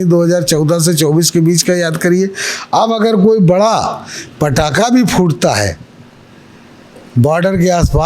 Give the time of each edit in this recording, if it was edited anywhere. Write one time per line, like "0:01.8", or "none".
none